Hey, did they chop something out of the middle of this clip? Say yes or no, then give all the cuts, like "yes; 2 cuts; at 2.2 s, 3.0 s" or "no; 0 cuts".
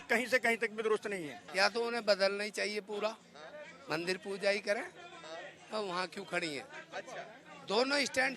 yes; 1 cut; at 1.4 s